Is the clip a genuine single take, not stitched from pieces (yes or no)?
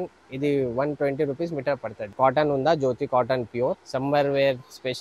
no